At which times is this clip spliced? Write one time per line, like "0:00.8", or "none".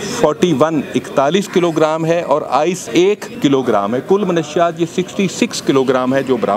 0:03.2